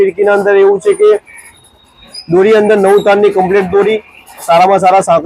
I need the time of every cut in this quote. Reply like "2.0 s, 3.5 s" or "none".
none